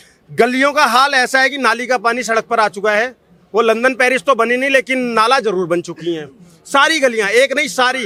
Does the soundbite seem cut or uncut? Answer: uncut